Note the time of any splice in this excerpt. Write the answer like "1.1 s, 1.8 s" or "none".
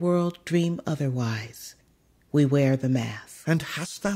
3.2 s